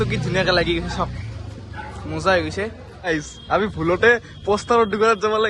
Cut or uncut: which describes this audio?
cut